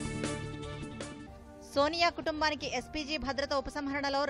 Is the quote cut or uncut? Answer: uncut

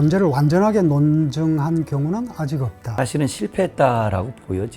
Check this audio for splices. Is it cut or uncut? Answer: cut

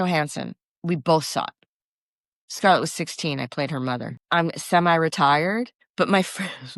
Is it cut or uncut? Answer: cut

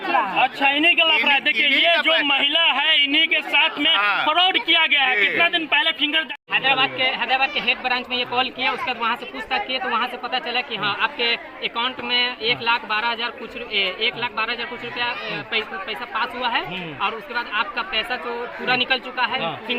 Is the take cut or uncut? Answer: cut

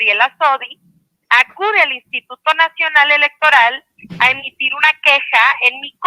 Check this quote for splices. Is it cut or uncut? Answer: uncut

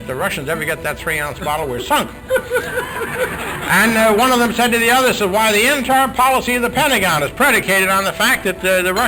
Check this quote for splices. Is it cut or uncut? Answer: uncut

